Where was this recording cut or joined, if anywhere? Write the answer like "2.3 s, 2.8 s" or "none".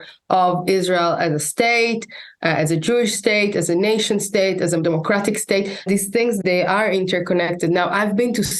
6.0 s